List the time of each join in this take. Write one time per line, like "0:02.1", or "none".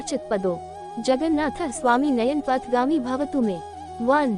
none